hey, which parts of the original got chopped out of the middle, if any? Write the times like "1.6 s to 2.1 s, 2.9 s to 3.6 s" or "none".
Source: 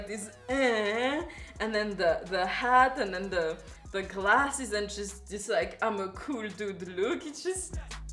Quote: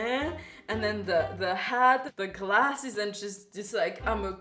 3.0 s to 3.8 s